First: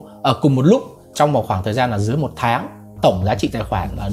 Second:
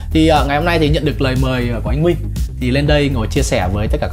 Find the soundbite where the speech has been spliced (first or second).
first